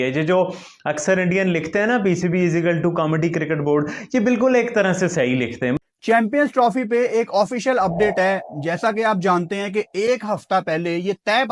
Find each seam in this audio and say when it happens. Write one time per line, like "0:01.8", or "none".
0:05.8